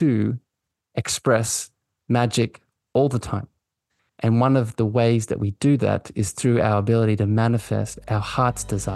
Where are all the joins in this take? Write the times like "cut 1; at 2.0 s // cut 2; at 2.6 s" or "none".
cut 1; at 7.9 s

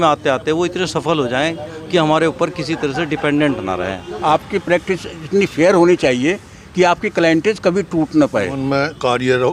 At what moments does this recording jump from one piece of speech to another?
cut 1; at 4.1 s // cut 2; at 8.5 s

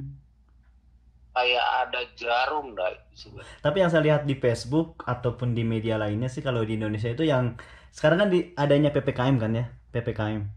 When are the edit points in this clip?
cut 1; at 3.5 s

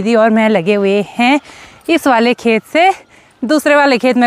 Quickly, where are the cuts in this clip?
none

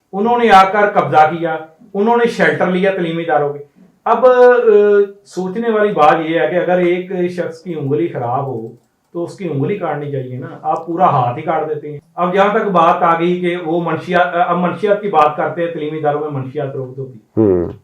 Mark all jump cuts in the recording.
cut 1; at 12.0 s

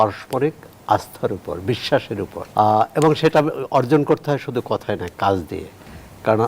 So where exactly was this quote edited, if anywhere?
cut 1; at 2.4 s

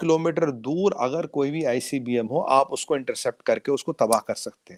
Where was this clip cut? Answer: none

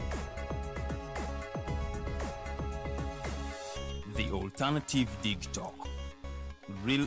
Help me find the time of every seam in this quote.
none

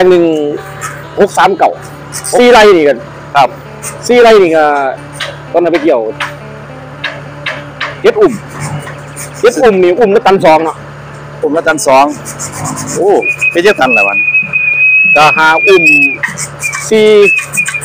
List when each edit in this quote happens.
none

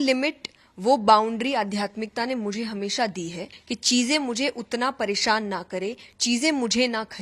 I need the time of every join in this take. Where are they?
cut 1; at 3.5 s

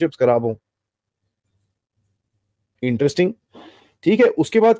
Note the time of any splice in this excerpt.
none

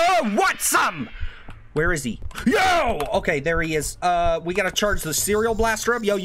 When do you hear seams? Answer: cut 1; at 2.3 s

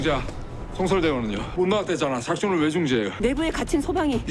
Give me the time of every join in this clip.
cut 1; at 1.5 s // cut 2; at 3.1 s

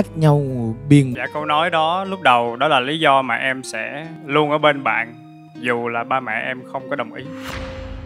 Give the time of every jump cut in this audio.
cut 1; at 1.1 s

